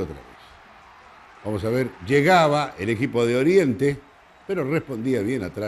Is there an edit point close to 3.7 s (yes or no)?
yes